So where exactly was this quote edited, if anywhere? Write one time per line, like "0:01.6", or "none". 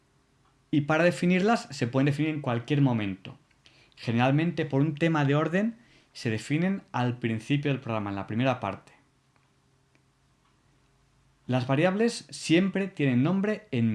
0:02.4